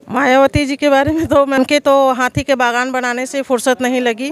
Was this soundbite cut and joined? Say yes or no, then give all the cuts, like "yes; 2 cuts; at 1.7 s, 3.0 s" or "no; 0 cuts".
yes; 1 cut; at 1.6 s